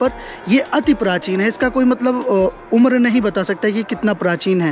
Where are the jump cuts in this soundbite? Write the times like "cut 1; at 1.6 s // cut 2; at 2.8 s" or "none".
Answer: none